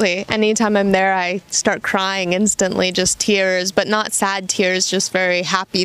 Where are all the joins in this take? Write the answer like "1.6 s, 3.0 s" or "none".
none